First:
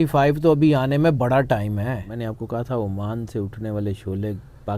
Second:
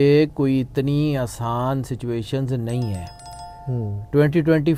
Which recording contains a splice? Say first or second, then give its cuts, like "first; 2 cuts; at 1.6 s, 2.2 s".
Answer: first; 1 cut; at 2.1 s